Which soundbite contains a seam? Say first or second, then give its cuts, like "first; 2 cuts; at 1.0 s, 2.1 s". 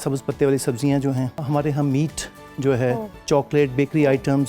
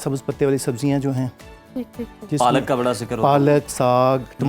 first; 2 cuts; at 1.4 s, 3.2 s